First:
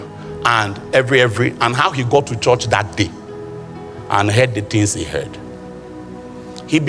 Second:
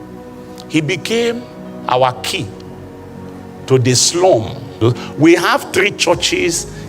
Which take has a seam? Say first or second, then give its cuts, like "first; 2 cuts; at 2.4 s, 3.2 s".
second; 1 cut; at 4.7 s